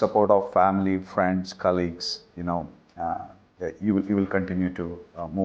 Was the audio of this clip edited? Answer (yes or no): no